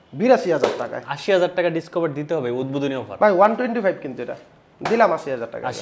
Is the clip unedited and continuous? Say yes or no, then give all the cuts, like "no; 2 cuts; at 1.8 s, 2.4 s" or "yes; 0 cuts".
yes; 0 cuts